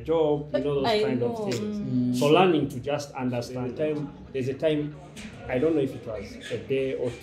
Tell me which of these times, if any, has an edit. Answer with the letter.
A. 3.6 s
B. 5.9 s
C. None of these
A